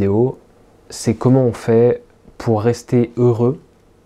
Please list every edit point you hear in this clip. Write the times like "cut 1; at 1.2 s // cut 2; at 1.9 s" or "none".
none